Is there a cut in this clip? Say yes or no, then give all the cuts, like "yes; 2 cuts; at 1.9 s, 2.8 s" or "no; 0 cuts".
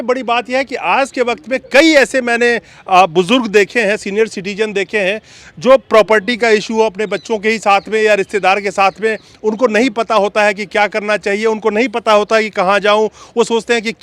no; 0 cuts